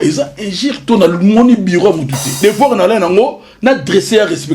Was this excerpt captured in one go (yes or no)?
no